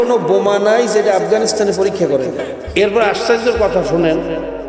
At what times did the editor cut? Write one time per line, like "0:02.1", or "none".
0:02.6